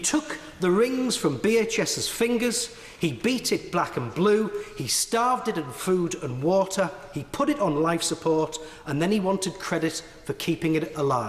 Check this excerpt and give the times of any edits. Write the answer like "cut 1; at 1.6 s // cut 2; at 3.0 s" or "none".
none